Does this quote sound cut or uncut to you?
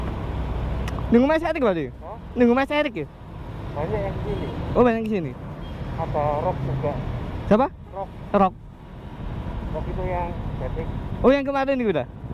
uncut